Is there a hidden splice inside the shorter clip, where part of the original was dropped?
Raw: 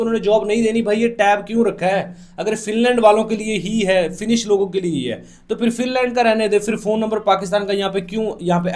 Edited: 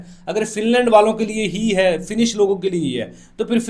no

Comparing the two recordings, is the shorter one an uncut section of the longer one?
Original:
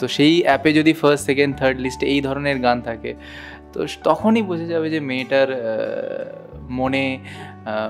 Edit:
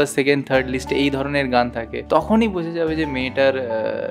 no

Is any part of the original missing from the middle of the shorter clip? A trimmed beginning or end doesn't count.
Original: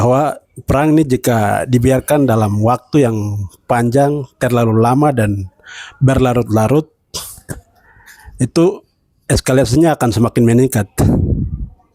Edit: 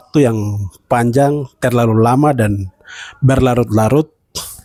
no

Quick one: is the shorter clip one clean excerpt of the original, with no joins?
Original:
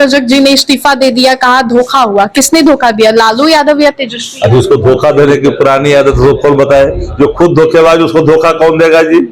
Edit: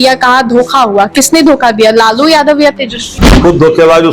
no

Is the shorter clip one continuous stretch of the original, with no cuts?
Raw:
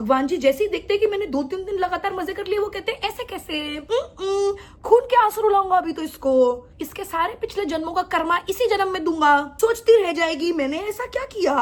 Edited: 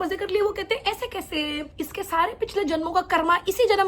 no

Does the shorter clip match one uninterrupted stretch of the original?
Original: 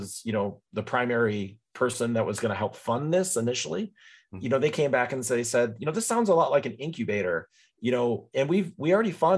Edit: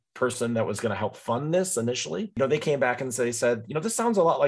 no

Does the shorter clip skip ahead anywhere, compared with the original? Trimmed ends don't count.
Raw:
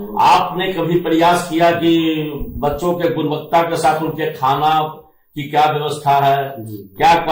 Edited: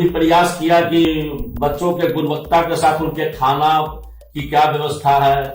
yes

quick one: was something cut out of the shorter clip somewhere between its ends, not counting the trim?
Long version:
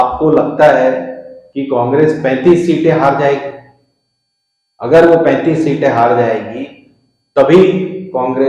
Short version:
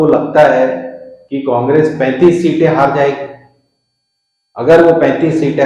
no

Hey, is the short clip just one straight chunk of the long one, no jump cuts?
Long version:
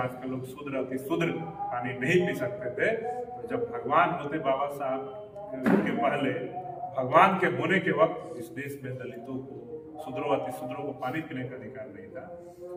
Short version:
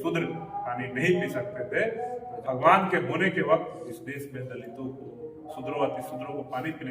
no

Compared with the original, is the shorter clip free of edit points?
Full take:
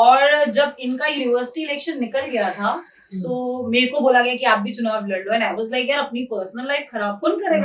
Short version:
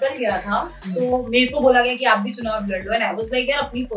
no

